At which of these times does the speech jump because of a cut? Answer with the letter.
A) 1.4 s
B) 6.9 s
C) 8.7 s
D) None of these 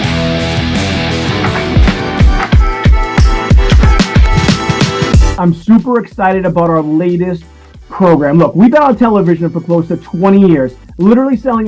A